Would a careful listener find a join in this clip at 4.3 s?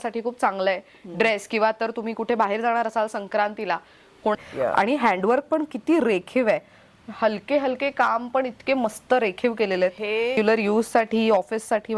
yes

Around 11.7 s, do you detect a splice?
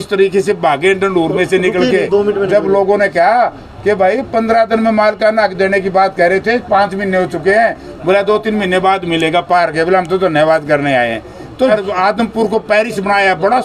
yes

